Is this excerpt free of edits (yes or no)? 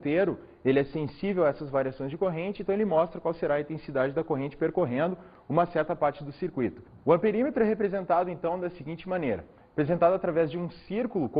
yes